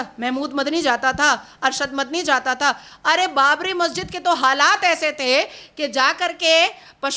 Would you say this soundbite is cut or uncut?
uncut